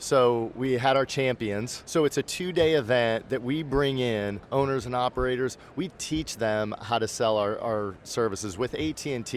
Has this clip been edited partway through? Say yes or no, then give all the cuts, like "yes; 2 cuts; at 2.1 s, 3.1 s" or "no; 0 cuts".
yes; 2 cuts; at 1.8 s, 4.4 s